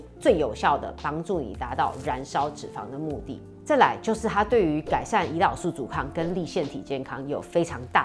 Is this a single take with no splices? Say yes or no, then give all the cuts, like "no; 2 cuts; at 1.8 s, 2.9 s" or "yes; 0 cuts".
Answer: yes; 0 cuts